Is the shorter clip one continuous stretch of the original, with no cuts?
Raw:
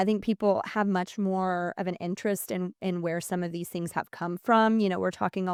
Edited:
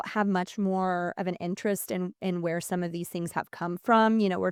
yes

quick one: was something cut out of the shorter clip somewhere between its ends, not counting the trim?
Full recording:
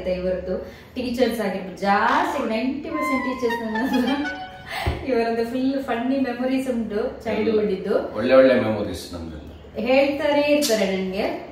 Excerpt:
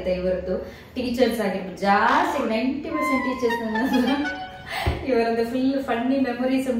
no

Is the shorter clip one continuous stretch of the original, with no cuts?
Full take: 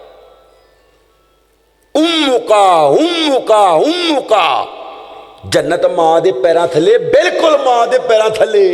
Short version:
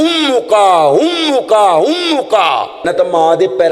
no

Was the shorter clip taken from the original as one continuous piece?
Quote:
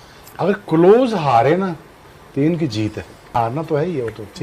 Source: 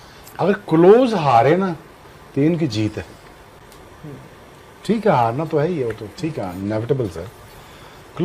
no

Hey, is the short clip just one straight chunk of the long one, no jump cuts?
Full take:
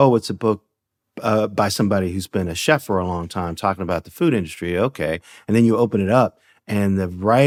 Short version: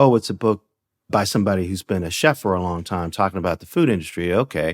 no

